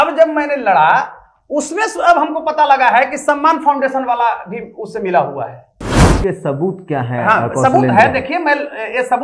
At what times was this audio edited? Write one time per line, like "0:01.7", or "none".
0:06.1